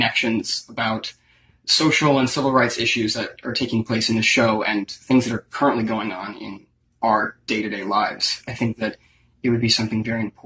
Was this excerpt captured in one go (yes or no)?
yes